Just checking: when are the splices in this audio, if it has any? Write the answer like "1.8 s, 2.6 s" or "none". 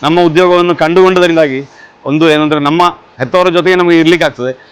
3.1 s